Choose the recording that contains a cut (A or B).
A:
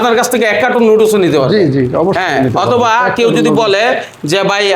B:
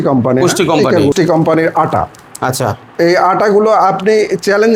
B